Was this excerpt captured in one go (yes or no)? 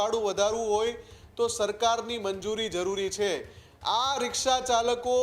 yes